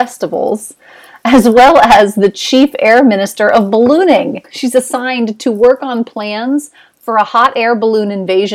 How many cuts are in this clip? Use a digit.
1